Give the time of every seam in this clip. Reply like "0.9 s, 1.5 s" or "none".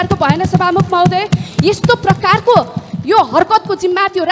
none